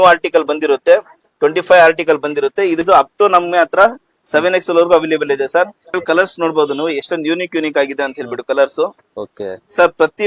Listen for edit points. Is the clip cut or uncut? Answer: cut